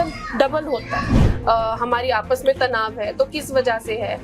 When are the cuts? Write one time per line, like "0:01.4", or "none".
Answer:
0:01.2